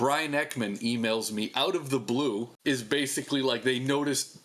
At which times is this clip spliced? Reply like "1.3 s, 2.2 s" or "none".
2.5 s